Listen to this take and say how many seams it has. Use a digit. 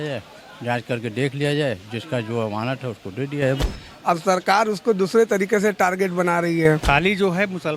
2